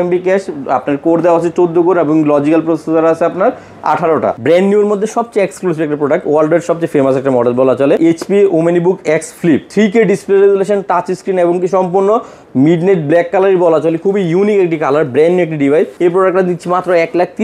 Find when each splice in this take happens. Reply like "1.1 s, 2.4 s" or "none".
4.4 s, 8.0 s, 9.7 s, 15.9 s

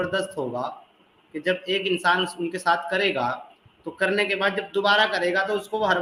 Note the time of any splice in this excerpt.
none

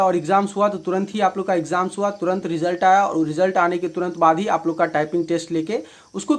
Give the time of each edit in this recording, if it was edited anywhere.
none

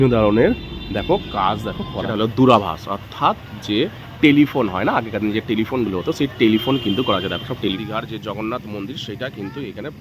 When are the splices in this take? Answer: 2.1 s, 7.8 s

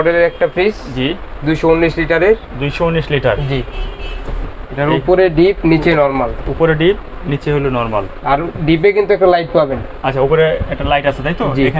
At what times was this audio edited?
none

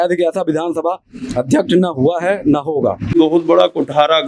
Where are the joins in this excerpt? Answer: 3.1 s

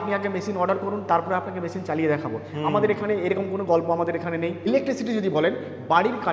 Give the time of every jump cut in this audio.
4.7 s

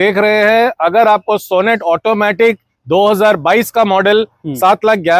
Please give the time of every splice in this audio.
none

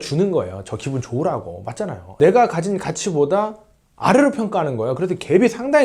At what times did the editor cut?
2.1 s

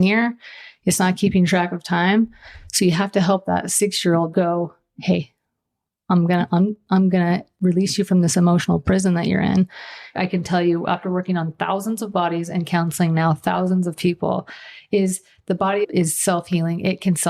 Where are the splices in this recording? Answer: 4.3 s, 10.1 s, 15.8 s

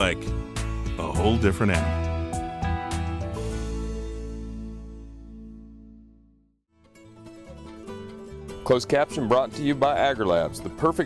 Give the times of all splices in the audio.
6.9 s, 8.2 s

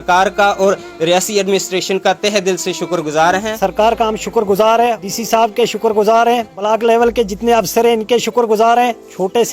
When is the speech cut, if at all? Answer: 3.5 s, 5.1 s, 6.6 s

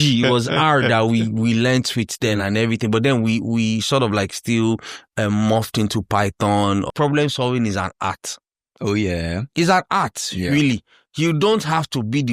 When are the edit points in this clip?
6.9 s

